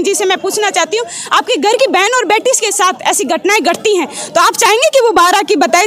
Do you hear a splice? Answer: no; 0 cuts

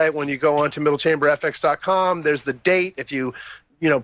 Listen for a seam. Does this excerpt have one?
no; 0 cuts

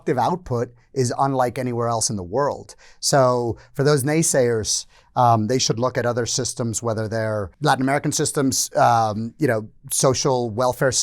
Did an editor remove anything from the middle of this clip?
yes; 1 cut; at 7.5 s

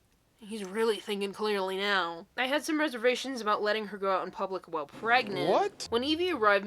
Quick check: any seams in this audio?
yes; 2 cuts; at 2.2 s, 5.6 s

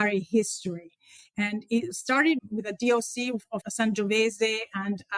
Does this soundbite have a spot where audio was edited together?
yes; 2 cuts; at 2.4 s, 3.6 s

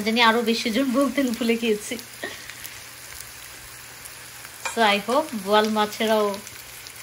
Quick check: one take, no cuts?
yes; 0 cuts

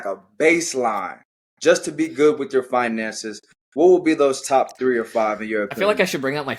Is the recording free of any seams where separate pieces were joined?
yes; 0 cuts

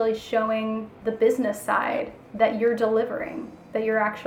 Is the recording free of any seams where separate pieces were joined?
yes; 0 cuts

